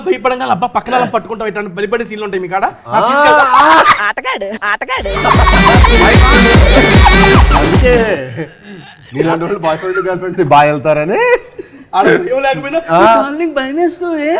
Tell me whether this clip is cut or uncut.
uncut